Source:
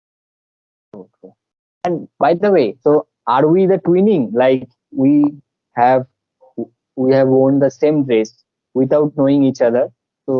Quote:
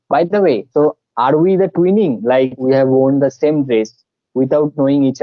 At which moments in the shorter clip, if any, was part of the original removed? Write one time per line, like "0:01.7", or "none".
0:02.6